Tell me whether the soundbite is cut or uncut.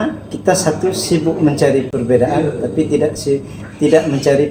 uncut